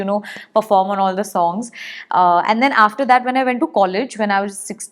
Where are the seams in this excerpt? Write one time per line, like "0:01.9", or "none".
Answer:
none